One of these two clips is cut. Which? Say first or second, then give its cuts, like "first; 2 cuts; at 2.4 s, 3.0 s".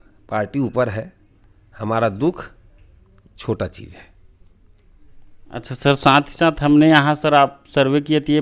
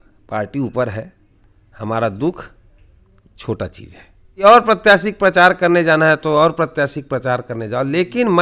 second; 1 cut; at 4.4 s